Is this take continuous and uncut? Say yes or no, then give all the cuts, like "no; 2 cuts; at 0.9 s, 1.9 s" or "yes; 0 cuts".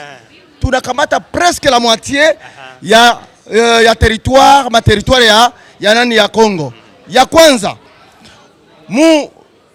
yes; 0 cuts